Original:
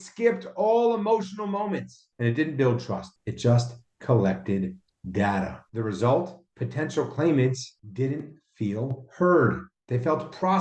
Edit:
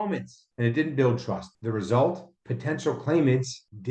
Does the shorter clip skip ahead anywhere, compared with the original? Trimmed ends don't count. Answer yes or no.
yes